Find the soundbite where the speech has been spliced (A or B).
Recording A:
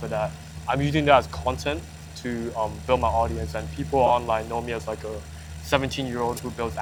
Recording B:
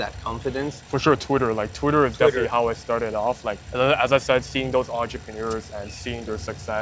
B